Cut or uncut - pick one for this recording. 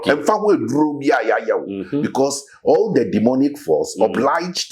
uncut